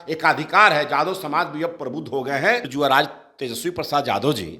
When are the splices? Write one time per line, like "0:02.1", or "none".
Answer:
0:02.7

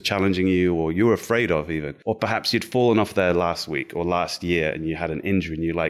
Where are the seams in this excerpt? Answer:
0:01.9

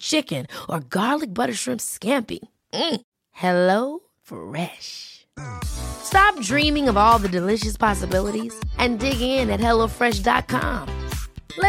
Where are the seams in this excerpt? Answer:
none

